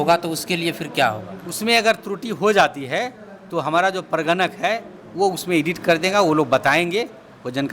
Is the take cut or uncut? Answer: uncut